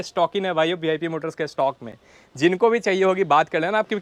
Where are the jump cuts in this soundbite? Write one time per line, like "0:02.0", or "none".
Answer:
none